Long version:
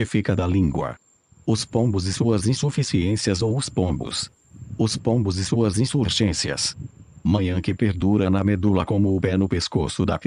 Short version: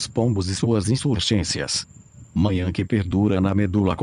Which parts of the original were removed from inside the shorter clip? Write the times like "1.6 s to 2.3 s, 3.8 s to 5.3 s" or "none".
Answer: 2.5 s to 5.8 s

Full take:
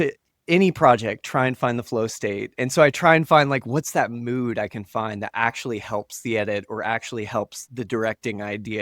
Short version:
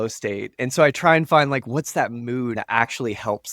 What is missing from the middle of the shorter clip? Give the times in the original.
4.5 s to 5.2 s

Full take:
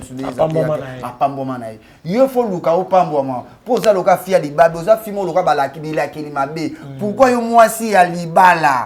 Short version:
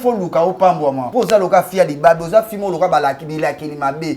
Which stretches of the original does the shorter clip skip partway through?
3.3 s to 3.6 s

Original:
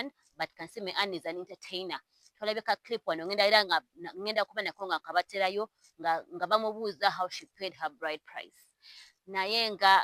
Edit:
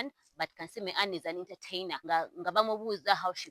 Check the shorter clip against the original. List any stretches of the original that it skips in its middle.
1.9 s to 5.9 s

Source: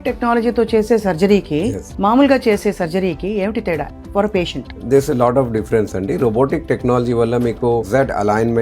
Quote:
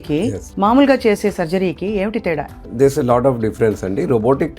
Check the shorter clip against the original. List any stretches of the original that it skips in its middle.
4.0 s to 4.7 s

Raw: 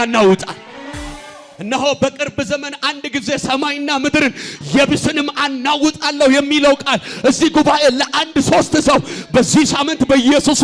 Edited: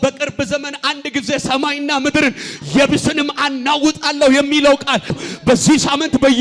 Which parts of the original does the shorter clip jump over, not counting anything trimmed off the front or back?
7.2 s to 9.0 s

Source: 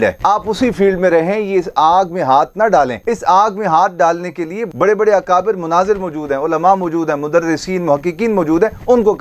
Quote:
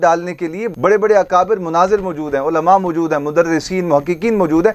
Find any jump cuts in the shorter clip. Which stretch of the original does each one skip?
none

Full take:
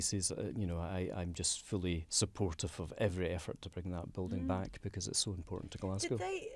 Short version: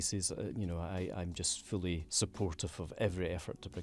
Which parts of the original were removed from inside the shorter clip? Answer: none

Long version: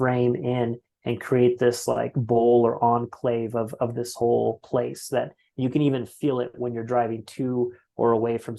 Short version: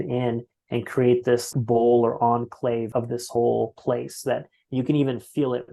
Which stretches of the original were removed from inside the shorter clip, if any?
1.8 s to 2.1 s, 3.5 s to 3.7 s

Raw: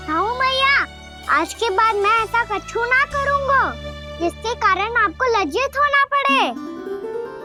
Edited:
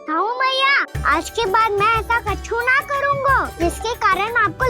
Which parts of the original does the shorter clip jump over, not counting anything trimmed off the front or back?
0.9 s to 1.1 s, 3.7 s to 4.1 s

